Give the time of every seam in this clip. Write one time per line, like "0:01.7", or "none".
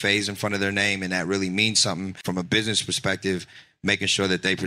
0:02.2